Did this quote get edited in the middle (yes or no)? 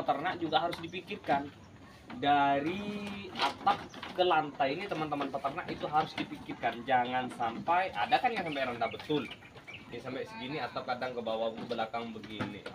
no